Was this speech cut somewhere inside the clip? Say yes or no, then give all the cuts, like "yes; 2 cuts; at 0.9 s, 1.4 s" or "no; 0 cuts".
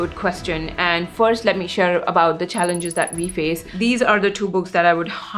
yes; 1 cut; at 3.7 s